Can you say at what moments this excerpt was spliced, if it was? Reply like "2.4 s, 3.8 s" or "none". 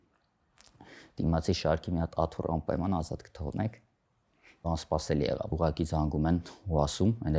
4.6 s, 5.5 s